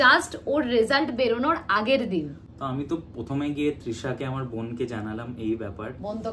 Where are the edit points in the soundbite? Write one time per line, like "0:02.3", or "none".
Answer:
none